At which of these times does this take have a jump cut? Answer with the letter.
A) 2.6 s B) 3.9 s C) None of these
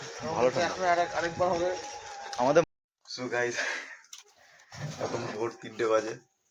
A